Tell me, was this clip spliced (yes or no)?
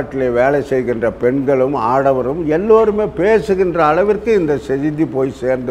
no